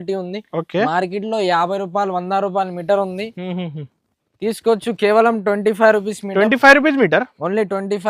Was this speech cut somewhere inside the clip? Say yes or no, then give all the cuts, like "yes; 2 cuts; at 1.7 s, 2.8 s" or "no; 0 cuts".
no; 0 cuts